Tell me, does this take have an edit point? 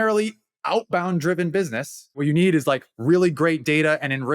yes; 1 cut; at 2.2 s

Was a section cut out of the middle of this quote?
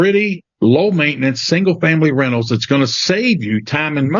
no; 0 cuts

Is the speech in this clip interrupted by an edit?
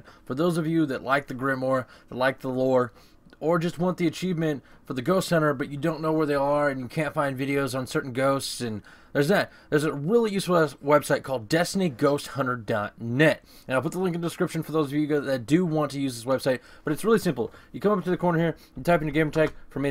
no; 0 cuts

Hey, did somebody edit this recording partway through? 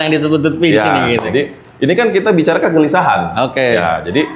no; 0 cuts

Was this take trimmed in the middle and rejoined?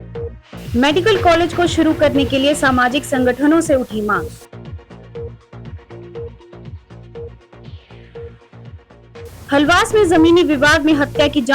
yes; 1 cut; at 9.5 s

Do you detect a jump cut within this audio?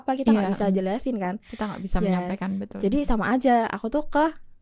no; 0 cuts

